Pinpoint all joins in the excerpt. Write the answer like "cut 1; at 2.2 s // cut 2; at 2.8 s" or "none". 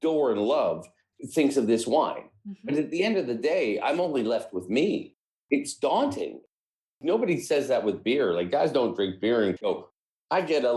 cut 1; at 1.1 s // cut 2; at 9.6 s

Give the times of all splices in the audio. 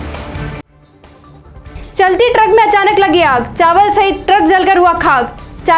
cut 1; at 1.6 s

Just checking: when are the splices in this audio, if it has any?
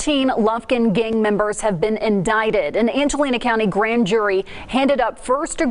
none

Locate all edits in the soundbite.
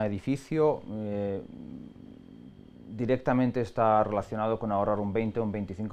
none

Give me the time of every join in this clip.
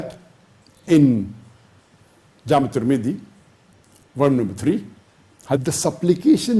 cut 1; at 5.6 s

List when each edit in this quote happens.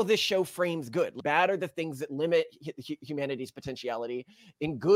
cut 1; at 1.2 s

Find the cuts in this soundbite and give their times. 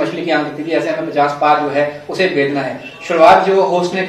none

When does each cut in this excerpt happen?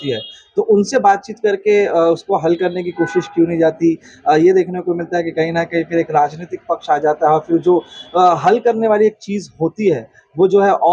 none

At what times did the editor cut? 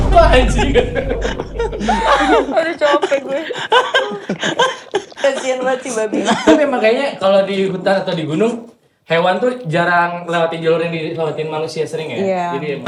none

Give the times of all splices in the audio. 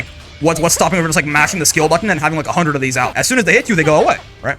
cut 1; at 3.2 s

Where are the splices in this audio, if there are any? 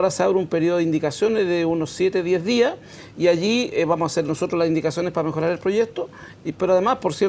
cut 1; at 1.9 s

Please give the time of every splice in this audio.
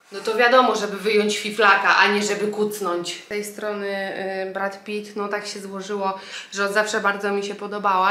cut 1; at 3.2 s

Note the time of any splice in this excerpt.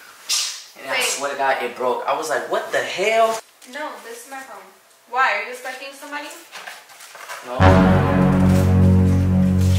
cut 1; at 3.5 s

